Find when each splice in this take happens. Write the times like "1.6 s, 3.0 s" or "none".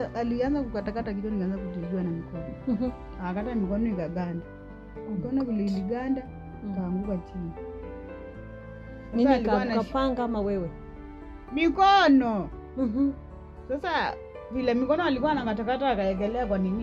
none

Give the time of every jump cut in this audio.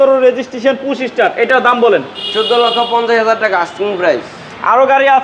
none

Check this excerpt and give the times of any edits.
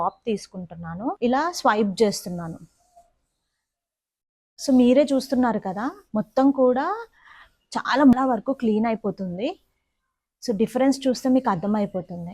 1.1 s, 8.1 s

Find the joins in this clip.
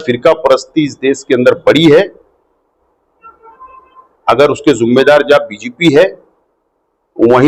none

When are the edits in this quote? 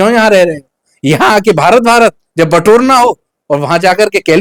none

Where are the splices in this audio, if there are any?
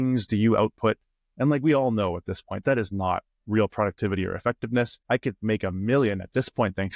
5.0 s

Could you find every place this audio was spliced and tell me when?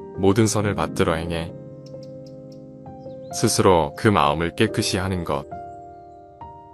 none

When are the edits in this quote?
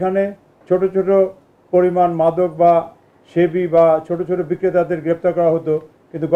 none

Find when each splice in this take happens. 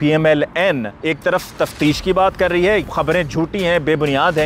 0.9 s, 2.8 s

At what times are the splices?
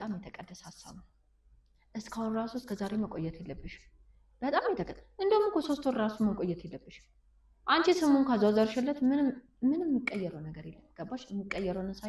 none

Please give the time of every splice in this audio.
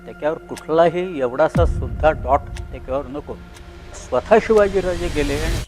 4.0 s

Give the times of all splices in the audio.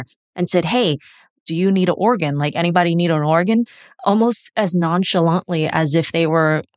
1.4 s

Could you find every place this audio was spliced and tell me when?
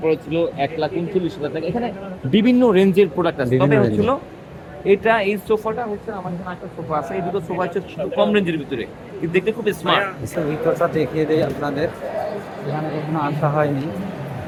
none

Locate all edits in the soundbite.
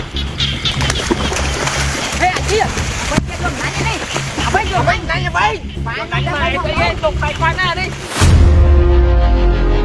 8.0 s

